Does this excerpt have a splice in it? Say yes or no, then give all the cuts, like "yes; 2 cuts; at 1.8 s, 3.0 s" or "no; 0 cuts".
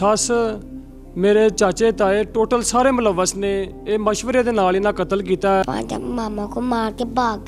yes; 1 cut; at 5.6 s